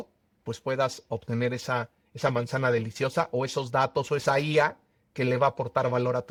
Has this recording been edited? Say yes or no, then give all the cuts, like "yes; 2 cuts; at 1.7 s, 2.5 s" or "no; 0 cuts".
no; 0 cuts